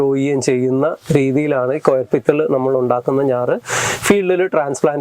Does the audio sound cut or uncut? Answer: uncut